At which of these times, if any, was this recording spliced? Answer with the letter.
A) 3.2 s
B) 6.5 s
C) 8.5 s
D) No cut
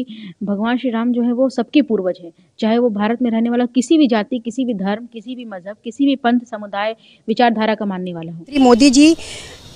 C